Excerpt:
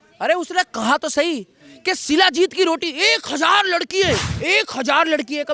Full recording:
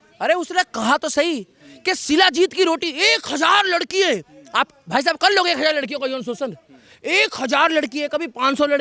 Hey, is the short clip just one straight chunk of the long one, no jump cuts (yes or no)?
no